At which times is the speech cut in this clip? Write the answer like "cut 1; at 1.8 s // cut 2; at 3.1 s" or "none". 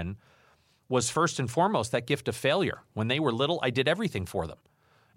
none